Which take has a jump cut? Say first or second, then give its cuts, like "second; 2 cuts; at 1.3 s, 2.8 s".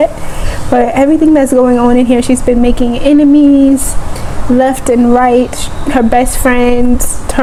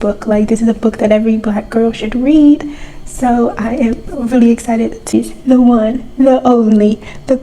second; 1 cut; at 5.1 s